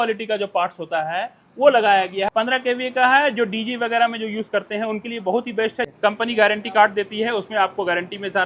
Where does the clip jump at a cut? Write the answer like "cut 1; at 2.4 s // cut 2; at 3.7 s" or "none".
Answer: cut 1; at 2.3 s // cut 2; at 5.9 s